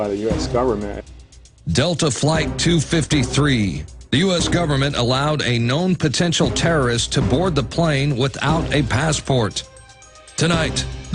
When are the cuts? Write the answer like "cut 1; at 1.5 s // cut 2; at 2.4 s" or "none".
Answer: cut 1; at 2.2 s